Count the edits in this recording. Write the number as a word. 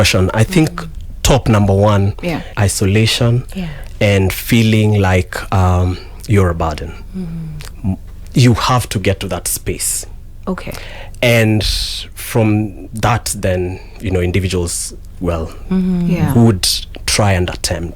one